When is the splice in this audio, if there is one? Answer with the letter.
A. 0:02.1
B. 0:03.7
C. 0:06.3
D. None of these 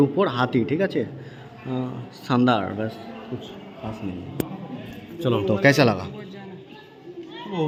D